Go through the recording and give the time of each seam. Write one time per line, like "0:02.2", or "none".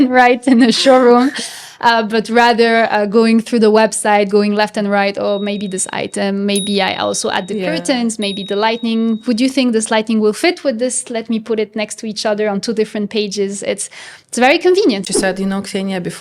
0:15.1

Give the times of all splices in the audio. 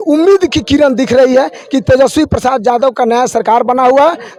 none

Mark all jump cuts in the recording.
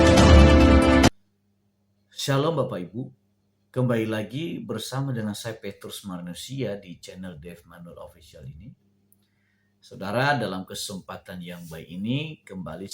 0:01.1

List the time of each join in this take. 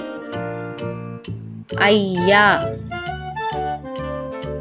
0:02.6
0:03.9

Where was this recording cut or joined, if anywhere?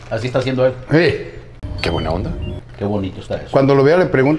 0:02.6

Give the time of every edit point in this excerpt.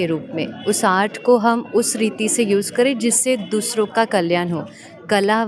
none

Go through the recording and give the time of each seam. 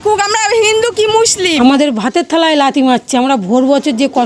0:01.5

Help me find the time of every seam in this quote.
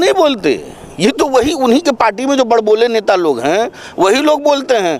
none

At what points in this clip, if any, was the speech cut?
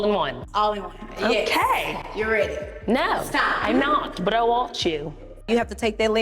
0:05.3

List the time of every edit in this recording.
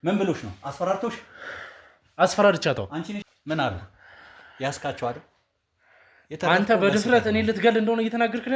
0:03.2

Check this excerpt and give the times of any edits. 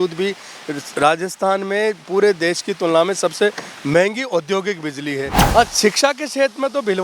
0:05.4

